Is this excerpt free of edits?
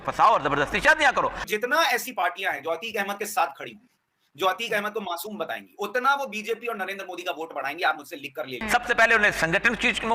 no; 2 cuts; at 1.4 s, 8.6 s

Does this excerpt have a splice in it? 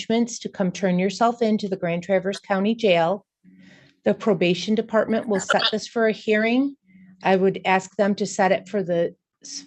no; 0 cuts

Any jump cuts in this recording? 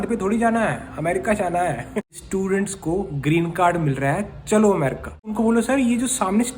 yes; 2 cuts; at 1.9 s, 5.3 s

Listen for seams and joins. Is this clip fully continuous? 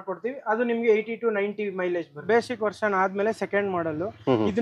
no; 1 cut; at 2.2 s

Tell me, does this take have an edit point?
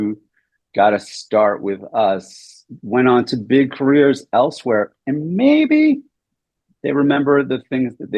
no; 0 cuts

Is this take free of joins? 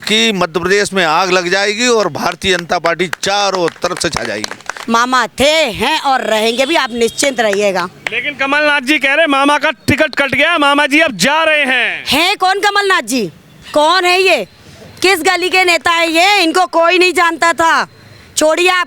no; 1 cut; at 4.7 s

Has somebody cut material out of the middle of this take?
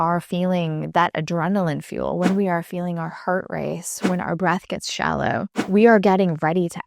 yes; 1 cut; at 5.6 s

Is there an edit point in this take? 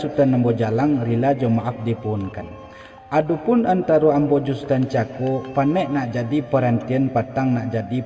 no; 0 cuts

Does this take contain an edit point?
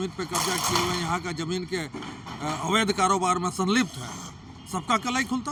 no; 0 cuts

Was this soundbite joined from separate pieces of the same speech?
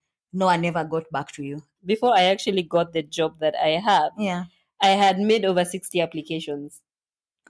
yes; 1 cut; at 1.8 s

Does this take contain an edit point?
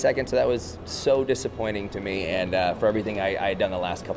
no; 0 cuts

